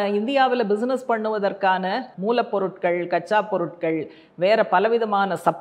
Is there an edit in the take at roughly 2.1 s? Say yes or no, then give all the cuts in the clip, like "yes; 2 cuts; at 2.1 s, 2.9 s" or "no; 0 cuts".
yes; 1 cut; at 2.1 s